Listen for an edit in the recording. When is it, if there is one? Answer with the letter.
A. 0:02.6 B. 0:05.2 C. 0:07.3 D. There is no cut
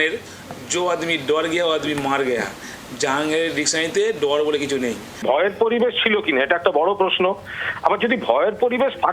B